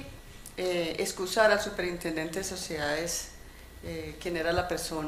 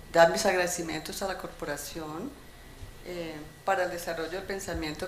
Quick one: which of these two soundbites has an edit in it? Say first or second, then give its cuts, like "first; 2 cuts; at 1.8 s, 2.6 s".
second; 1 cut; at 2.1 s